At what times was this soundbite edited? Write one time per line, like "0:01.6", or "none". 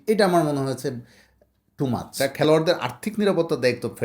0:02.1